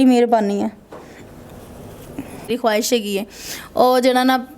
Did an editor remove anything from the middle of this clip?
yes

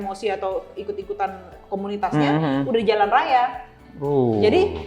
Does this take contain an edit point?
yes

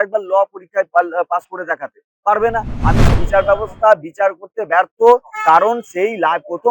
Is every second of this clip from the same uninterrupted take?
no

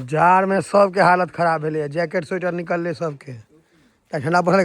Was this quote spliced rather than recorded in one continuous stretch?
no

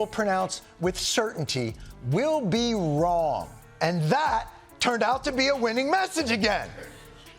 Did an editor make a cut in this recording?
yes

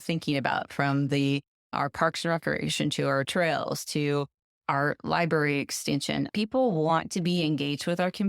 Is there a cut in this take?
yes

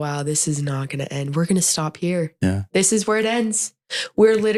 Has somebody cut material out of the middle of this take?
no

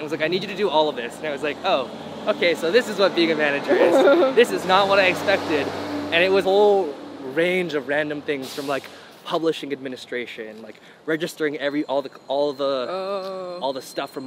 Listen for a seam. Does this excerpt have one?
no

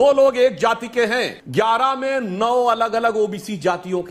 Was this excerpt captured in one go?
no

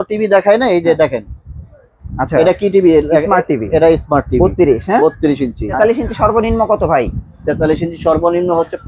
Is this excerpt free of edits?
no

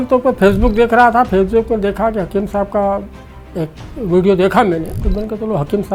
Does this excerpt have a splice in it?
yes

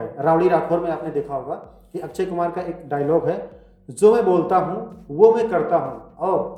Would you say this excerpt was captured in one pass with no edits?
yes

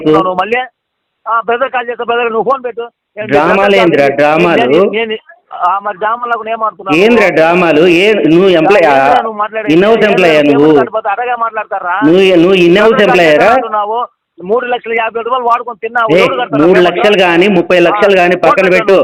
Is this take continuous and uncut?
yes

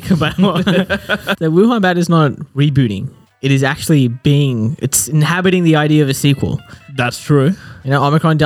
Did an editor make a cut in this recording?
yes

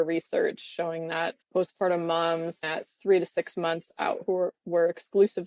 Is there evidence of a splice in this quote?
yes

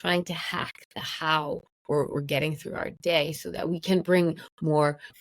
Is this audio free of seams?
no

